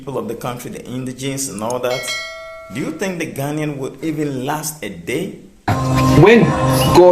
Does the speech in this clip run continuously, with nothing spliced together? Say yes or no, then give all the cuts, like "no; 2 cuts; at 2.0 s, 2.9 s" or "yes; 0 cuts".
no; 1 cut; at 5.8 s